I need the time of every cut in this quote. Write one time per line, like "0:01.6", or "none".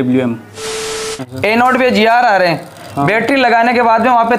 0:01.0